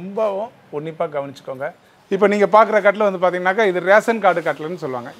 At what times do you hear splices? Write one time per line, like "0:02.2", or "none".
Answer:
0:01.9